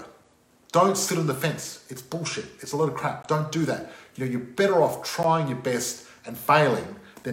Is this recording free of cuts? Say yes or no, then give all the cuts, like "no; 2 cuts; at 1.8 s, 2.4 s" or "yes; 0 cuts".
yes; 0 cuts